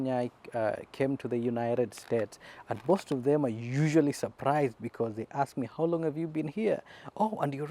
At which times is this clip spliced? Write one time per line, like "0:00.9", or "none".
none